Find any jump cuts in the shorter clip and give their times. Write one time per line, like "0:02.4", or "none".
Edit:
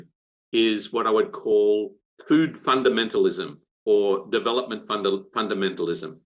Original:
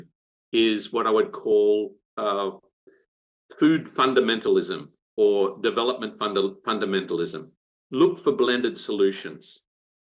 0:02.0

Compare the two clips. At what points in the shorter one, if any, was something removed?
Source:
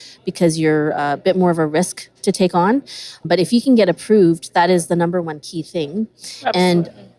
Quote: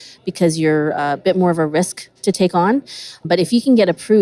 none

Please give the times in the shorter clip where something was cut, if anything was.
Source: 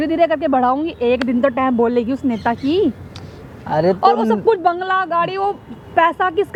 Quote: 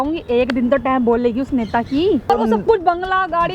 0:02.3

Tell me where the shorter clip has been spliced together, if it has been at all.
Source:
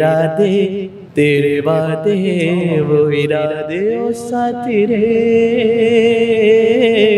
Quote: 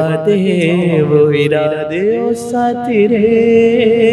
none

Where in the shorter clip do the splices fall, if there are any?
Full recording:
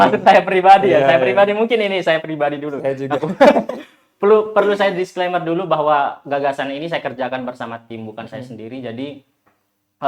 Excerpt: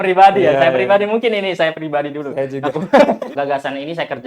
0:03.3

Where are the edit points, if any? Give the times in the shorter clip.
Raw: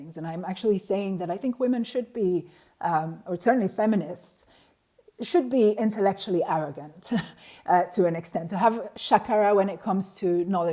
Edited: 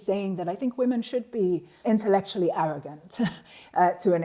0:01.8

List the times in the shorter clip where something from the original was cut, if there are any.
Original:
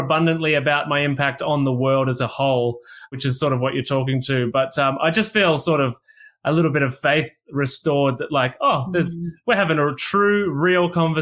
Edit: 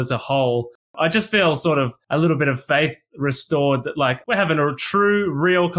0:01.0
0:02.0
0:04.2

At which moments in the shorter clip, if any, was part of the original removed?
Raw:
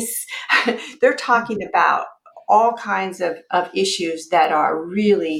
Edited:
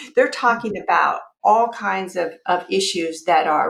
0:01.3

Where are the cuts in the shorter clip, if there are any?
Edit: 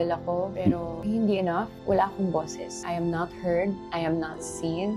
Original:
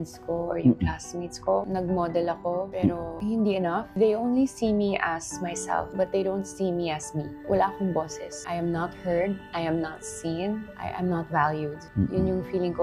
0:01.7

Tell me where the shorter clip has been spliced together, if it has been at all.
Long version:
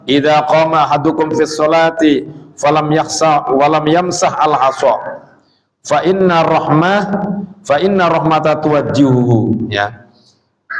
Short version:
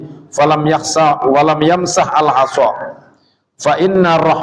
none

